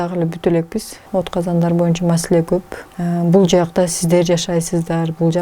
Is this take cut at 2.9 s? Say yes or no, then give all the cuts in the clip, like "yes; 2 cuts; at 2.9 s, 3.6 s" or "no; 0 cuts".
yes; 2 cuts; at 1.0 s, 2.9 s